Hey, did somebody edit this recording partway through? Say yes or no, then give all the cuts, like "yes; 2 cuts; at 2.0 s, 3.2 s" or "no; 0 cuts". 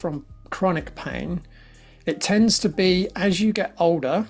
no; 0 cuts